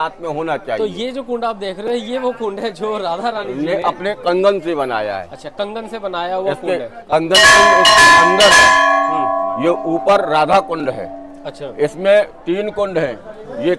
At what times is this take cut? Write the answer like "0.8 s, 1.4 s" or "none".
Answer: none